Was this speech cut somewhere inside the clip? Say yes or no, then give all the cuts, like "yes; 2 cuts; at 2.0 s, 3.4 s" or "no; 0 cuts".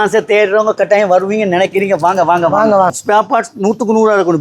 yes; 1 cut; at 3.0 s